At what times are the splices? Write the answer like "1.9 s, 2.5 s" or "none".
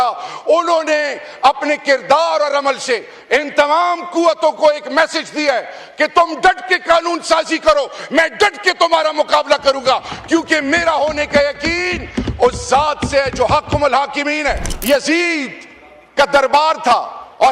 14.7 s